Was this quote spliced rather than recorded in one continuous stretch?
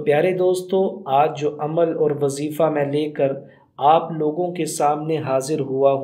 no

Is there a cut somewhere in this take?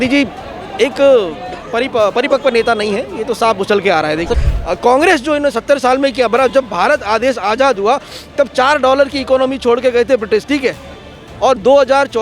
yes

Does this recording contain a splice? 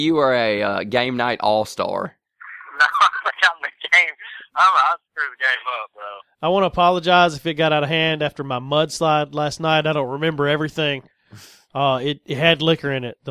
no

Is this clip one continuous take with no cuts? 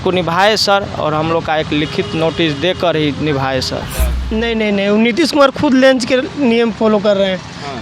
no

